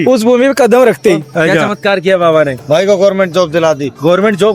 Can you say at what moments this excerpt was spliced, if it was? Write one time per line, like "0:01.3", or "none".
0:01.6